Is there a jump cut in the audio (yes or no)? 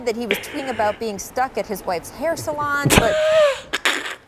yes